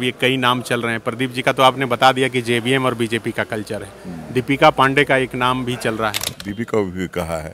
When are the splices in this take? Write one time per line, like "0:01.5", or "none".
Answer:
0:06.3